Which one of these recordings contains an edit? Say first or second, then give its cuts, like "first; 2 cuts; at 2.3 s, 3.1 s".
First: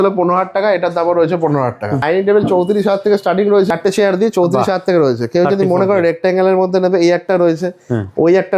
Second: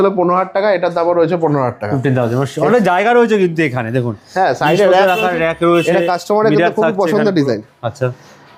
first; 2 cuts; at 2.0 s, 3.7 s